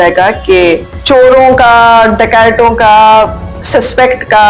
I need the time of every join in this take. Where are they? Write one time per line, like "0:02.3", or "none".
0:00.9